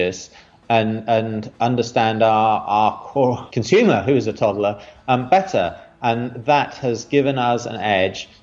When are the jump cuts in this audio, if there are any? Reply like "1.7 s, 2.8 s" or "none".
3.5 s

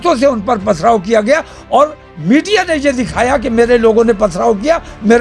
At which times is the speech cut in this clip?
none

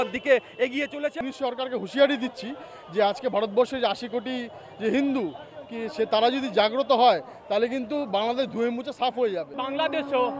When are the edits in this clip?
1.2 s, 9.6 s

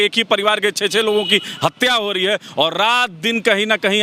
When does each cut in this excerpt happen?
none

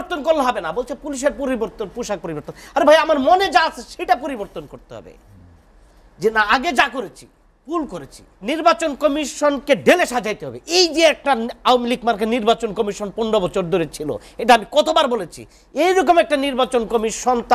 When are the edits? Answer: 8.4 s

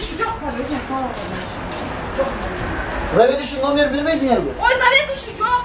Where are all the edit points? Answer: none

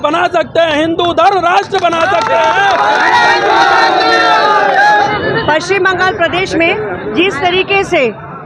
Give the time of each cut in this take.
none

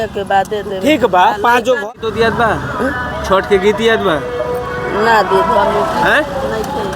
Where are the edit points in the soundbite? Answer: 1.8 s

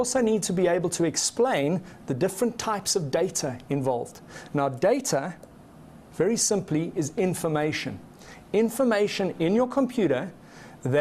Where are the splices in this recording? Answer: 6.7 s

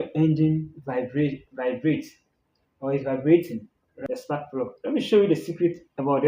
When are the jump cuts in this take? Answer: 4.1 s

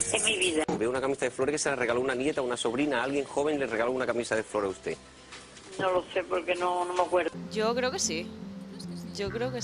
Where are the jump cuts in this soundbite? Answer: 7.4 s

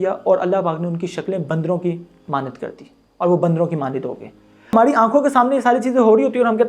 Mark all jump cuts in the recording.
4.7 s

